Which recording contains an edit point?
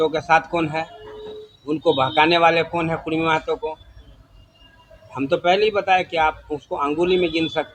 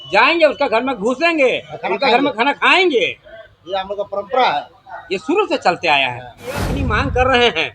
second; 1 cut; at 6.8 s

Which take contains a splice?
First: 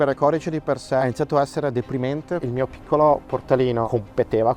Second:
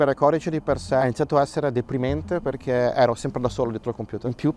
first; 1 cut; at 2.4 s

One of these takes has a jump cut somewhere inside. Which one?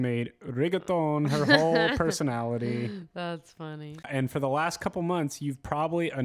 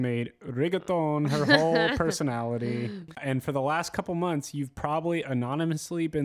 second; 1 cut; at 3.1 s

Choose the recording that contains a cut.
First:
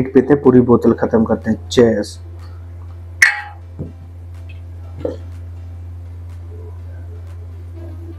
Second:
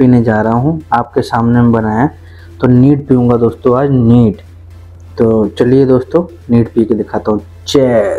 first; 1 cut; at 2.2 s

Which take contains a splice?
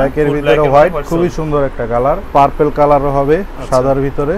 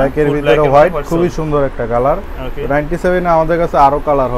first; 1 cut; at 2.2 s

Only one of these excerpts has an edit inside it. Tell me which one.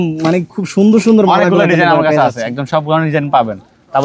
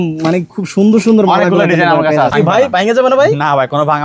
second; 1 cut; at 2.3 s

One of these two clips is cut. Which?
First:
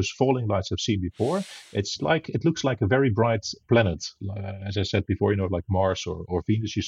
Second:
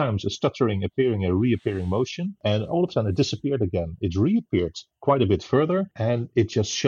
second; 2 cuts; at 2.3 s, 5.9 s

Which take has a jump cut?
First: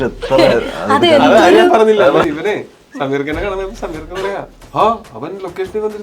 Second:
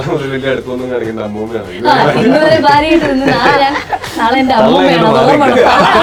first; 1 cut; at 2.2 s

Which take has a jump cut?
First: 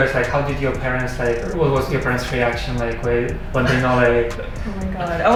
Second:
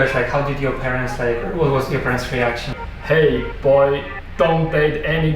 second; 1 cut; at 2.7 s

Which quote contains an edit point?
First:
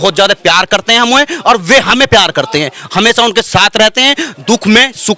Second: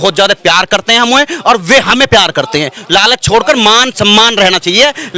second; 1 cut; at 2.8 s

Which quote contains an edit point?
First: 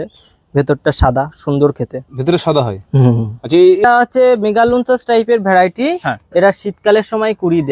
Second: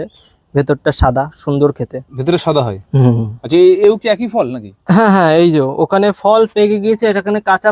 first; 1 cut; at 3.8 s

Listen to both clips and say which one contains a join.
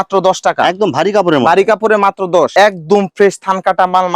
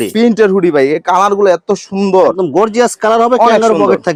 first; 1 cut; at 2.5 s

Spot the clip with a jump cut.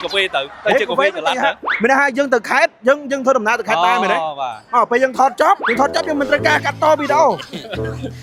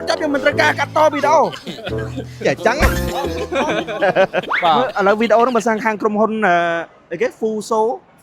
second; 1 cut; at 4.5 s

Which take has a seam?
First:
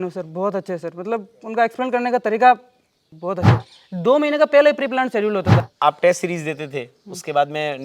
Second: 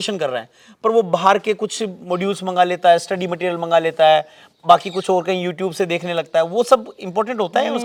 first; 2 cuts; at 3.5 s, 5.6 s

